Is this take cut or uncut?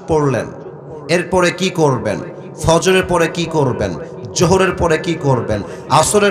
uncut